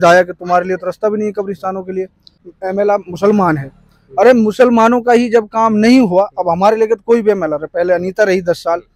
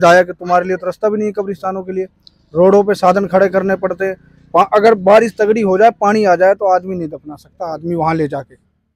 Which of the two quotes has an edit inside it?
first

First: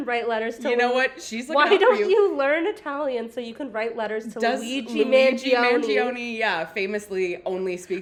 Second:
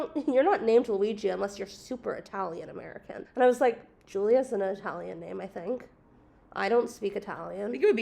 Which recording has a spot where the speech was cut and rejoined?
second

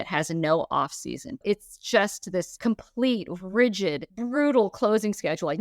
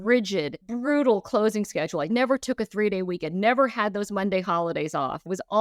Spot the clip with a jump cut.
first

